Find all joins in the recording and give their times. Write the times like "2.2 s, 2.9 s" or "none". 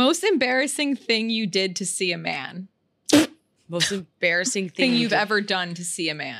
none